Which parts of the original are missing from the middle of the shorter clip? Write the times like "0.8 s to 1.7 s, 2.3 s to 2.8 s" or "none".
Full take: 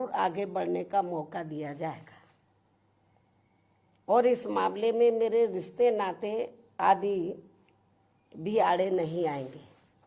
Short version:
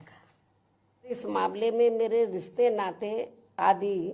3.2 s to 4.4 s